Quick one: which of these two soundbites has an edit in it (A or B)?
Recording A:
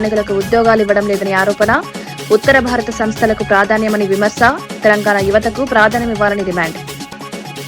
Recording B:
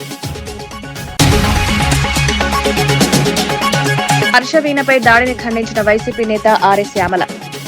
B